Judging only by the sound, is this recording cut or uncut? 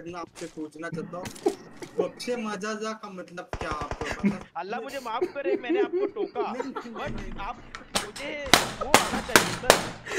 cut